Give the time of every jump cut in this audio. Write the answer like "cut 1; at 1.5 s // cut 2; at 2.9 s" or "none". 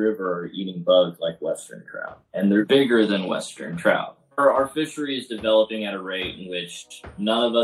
cut 1; at 2.7 s // cut 2; at 4.3 s